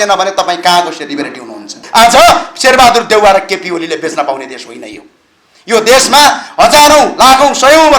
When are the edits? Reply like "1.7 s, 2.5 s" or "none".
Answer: 1.8 s